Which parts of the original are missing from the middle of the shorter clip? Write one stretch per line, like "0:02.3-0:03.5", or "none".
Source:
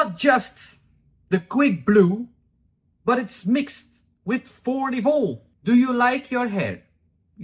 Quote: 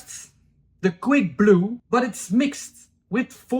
0:02.3-0:02.9